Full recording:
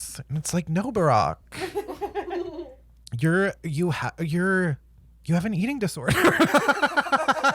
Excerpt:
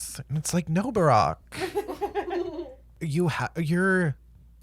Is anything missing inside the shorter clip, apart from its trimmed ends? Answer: yes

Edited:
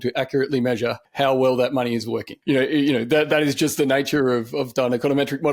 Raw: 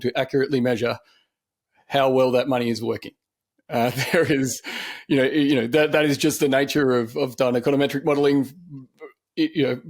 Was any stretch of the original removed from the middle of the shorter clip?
yes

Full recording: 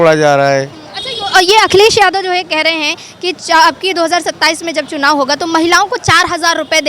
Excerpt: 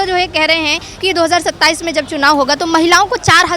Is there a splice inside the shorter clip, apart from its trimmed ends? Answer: yes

